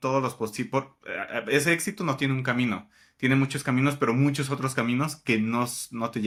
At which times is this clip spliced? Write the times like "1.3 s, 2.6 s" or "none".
none